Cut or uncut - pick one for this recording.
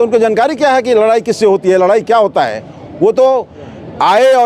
uncut